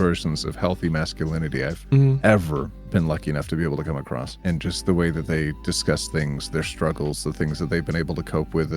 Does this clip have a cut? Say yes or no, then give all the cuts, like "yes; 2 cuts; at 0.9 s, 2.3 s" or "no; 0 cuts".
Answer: yes; 1 cut; at 4.3 s